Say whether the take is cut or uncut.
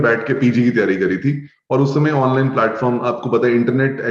uncut